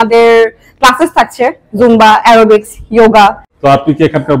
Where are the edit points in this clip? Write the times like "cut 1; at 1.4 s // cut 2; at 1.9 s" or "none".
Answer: cut 1; at 3.5 s

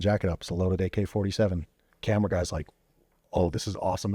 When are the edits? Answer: cut 1; at 1.9 s

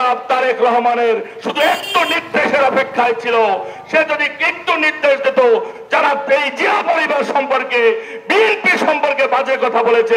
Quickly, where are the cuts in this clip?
none

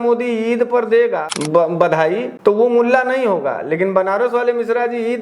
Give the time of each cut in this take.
cut 1; at 1.3 s // cut 2; at 2.3 s

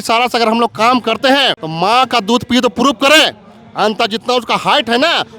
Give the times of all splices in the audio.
cut 1; at 1.6 s

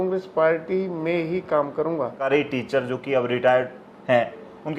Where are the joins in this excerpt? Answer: cut 1; at 2.3 s

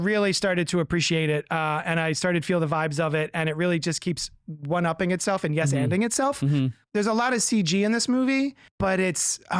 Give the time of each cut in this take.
cut 1; at 6.8 s // cut 2; at 8.6 s

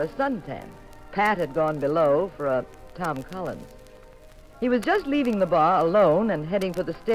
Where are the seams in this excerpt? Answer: cut 1; at 1.0 s

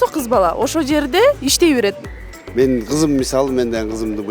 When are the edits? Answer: cut 1; at 2.0 s

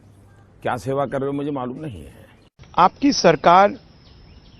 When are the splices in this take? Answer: cut 1; at 2.4 s

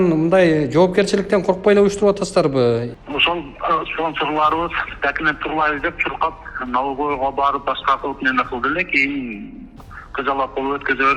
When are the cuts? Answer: cut 1; at 2.9 s

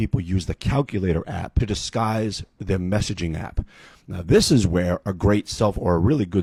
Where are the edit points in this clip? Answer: none

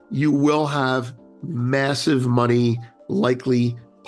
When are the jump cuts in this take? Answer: none

